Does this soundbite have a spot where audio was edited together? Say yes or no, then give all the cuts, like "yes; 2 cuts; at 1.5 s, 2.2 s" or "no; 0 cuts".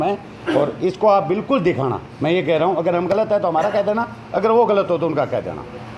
no; 0 cuts